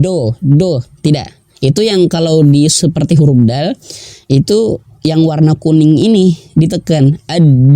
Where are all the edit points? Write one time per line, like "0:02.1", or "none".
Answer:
none